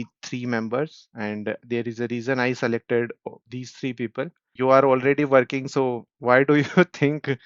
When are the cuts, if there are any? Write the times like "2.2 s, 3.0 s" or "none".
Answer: 4.5 s